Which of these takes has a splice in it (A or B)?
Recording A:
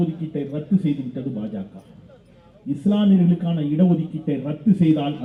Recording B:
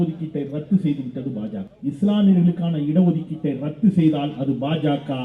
B